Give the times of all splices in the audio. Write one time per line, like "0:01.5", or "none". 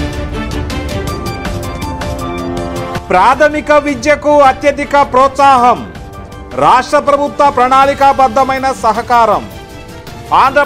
0:02.9